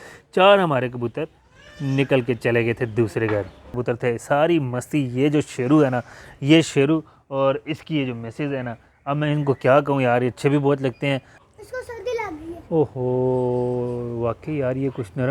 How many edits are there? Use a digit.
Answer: 2